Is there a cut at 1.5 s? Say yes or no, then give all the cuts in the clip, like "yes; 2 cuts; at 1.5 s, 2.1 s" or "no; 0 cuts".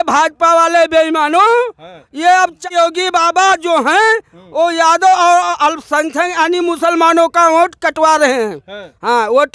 no; 1 cut; at 2.7 s